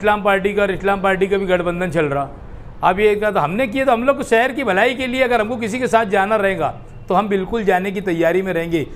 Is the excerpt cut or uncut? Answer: uncut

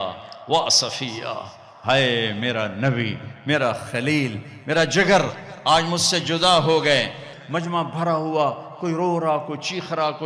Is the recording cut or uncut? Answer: cut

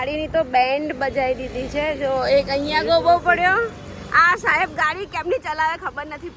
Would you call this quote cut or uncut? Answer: uncut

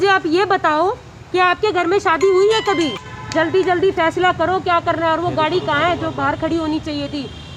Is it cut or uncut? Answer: cut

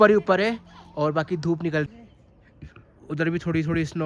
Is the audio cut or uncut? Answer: cut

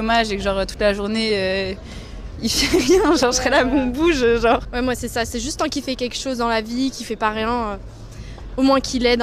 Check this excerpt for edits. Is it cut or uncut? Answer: uncut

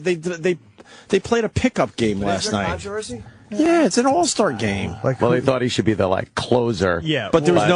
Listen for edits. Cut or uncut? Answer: uncut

